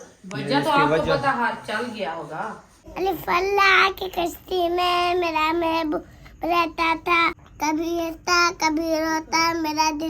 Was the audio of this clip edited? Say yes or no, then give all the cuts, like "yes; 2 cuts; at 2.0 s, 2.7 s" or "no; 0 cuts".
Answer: yes; 2 cuts; at 2.9 s, 7.4 s